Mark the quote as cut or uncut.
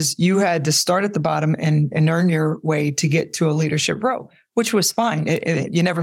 uncut